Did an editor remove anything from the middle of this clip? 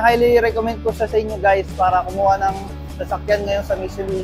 no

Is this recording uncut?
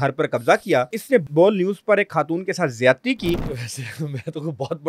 no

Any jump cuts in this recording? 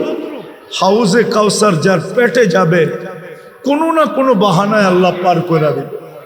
no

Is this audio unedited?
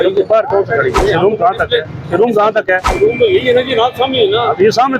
no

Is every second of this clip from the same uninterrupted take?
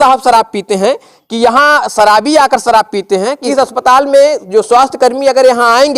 no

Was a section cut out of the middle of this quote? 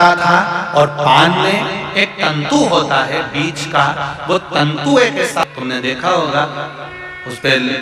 yes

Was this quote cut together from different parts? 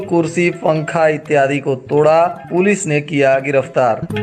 no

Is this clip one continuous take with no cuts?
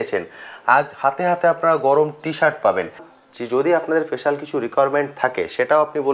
no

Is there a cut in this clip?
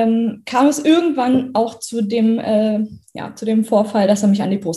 no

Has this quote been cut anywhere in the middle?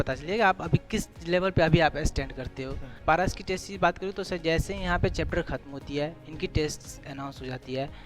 yes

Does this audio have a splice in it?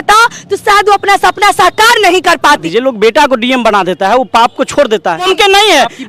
yes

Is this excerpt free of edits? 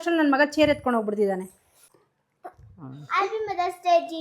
no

